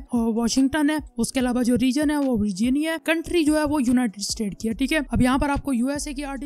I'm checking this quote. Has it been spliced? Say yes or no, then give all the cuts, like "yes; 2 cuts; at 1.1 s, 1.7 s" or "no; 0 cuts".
no; 0 cuts